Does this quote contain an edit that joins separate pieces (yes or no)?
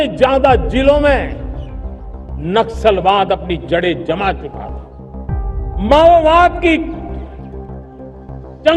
no